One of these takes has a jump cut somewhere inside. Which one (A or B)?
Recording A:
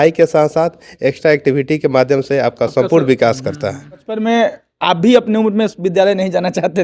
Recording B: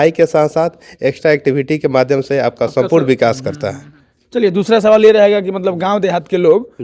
A